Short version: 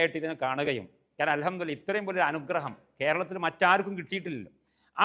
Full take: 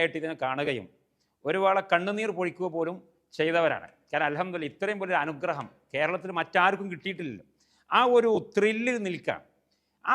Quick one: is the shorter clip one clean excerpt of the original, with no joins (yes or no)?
no